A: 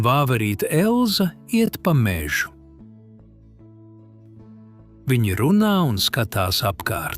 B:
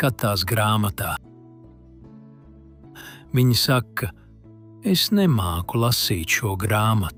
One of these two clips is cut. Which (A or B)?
A